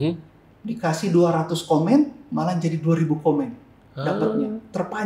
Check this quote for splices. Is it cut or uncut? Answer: uncut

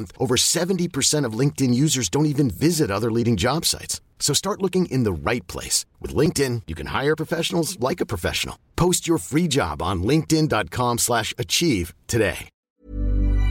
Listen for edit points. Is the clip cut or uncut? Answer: cut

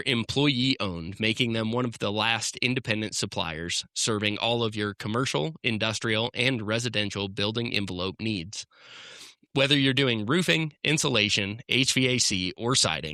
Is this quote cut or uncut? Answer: uncut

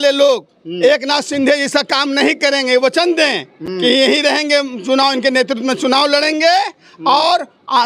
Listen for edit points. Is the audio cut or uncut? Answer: uncut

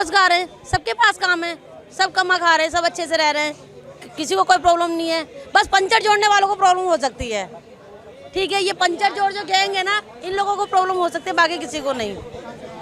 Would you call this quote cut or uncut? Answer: uncut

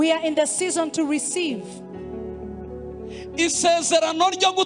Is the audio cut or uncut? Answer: cut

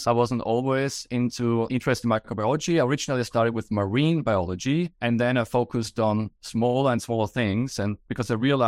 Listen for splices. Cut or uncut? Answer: uncut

